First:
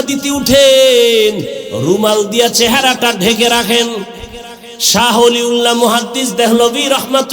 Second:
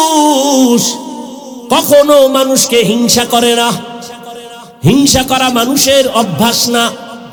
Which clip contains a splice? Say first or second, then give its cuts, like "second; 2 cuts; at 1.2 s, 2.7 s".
first; 1 cut; at 4.8 s